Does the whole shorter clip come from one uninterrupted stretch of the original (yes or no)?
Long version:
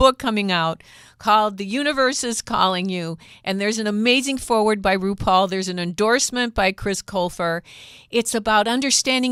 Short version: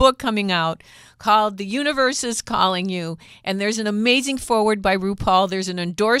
yes